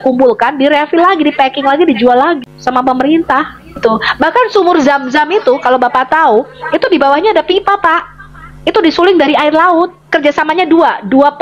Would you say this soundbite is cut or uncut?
cut